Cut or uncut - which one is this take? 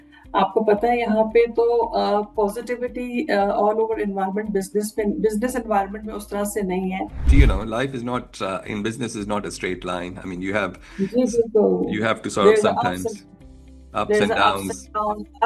cut